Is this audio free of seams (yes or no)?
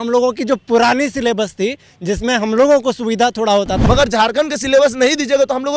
no